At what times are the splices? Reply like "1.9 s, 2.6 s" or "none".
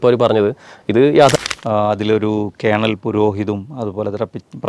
1.3 s